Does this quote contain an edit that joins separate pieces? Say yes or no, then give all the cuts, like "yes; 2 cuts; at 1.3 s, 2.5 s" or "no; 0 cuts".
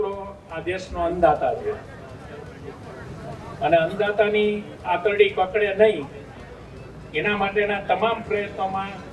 no; 0 cuts